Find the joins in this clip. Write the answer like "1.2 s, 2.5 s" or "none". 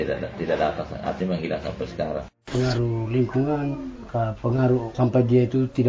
2.3 s, 3.9 s, 4.9 s